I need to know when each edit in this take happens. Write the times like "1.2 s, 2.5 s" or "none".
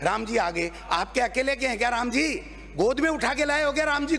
none